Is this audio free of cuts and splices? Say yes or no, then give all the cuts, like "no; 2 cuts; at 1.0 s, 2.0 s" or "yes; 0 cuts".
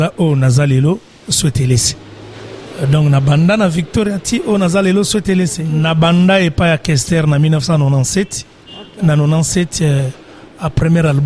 no; 1 cut; at 5.6 s